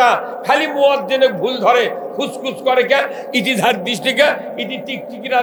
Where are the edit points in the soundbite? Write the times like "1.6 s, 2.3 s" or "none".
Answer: none